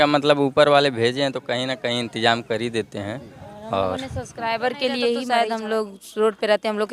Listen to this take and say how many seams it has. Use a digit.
1